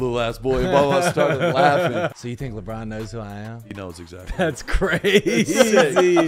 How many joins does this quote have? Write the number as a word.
one